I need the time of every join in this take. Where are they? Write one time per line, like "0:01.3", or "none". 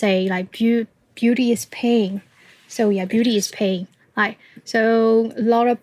none